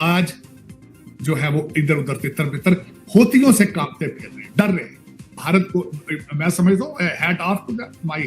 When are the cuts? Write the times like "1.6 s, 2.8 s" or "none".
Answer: 5.4 s